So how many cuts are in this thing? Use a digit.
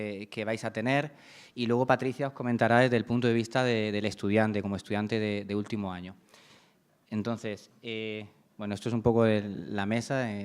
1